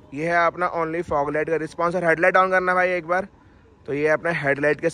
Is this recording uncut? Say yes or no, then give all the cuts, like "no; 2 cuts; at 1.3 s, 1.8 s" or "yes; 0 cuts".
yes; 0 cuts